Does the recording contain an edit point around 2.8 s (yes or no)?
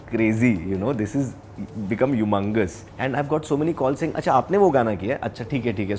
yes